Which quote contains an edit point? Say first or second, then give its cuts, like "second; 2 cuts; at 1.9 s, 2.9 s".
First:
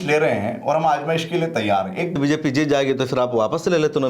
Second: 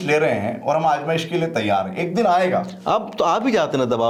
first; 1 cut; at 2.1 s